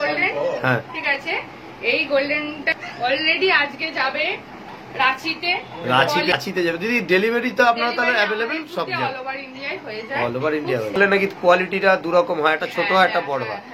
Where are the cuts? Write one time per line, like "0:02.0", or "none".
0:02.7
0:06.3
0:11.0

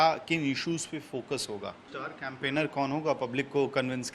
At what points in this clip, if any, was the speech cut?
0:01.8

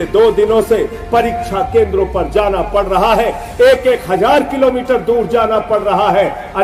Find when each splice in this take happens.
none

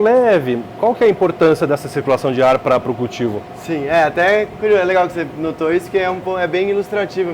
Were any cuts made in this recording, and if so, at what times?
none

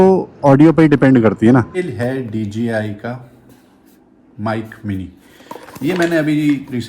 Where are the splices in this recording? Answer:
0:01.9

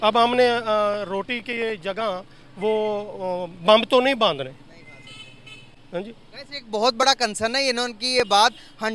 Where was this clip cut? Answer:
none

